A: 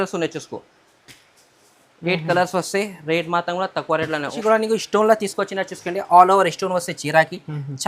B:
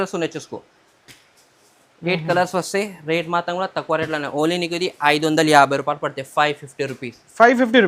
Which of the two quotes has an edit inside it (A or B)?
A